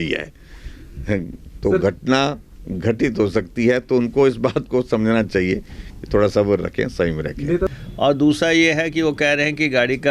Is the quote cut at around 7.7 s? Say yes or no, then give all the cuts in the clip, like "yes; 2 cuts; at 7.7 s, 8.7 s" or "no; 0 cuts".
yes; 1 cut; at 7.7 s